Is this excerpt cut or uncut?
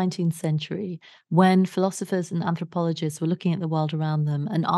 uncut